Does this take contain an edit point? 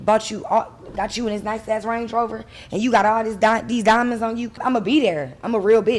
yes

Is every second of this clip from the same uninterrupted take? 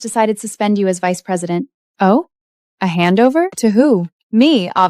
no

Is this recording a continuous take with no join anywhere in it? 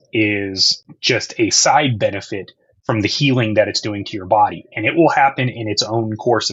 yes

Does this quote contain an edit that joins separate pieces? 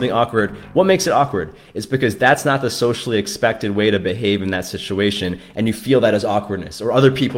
no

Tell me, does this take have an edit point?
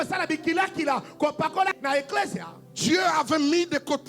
yes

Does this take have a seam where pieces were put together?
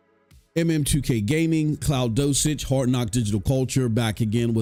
no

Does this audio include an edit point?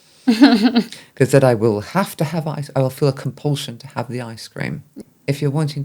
yes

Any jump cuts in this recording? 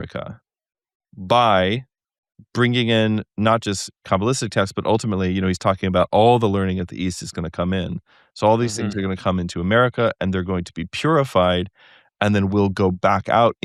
no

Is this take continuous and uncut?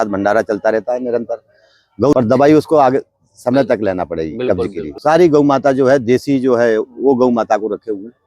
no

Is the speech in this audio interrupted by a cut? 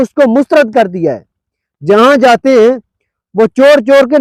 no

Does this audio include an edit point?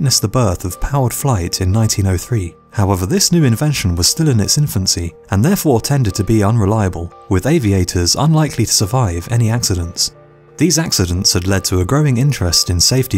yes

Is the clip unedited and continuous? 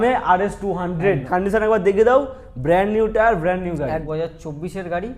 no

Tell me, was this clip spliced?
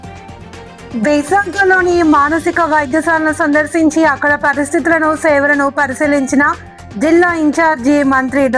yes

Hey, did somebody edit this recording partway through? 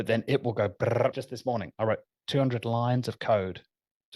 yes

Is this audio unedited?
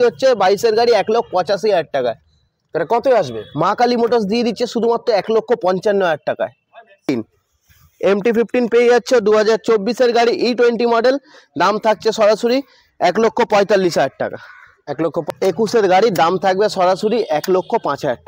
no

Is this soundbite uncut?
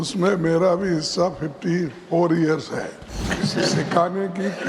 no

